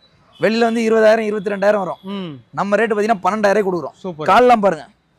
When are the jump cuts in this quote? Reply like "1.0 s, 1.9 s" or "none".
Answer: none